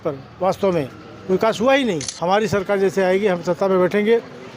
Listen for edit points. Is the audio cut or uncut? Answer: cut